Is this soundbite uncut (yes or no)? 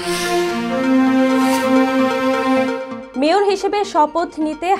no